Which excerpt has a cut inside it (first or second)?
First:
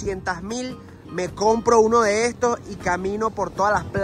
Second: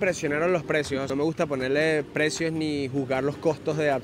second